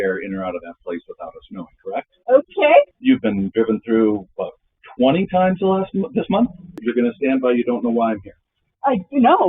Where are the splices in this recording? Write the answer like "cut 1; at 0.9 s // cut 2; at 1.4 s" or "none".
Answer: cut 1; at 2.9 s // cut 2; at 6.8 s